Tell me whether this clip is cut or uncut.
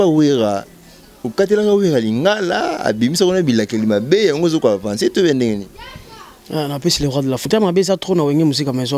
cut